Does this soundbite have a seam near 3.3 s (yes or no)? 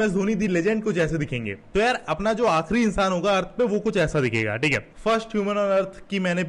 no